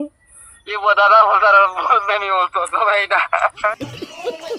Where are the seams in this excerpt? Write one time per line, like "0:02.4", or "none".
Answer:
0:03.7